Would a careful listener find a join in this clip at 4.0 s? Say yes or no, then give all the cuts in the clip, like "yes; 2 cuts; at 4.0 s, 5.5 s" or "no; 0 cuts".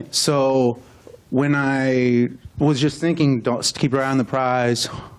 no; 1 cut; at 2.8 s